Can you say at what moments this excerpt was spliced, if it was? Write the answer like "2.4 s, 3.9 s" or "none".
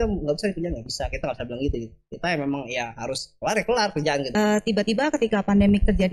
4.3 s